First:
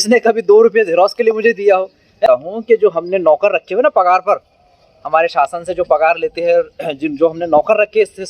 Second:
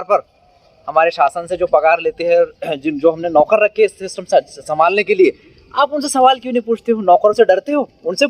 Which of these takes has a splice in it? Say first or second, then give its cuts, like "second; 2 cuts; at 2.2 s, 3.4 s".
first; 1 cut; at 2.3 s